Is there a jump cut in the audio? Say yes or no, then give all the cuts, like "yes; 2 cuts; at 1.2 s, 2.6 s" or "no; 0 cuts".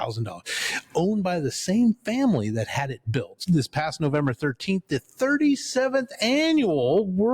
yes; 1 cut; at 3.3 s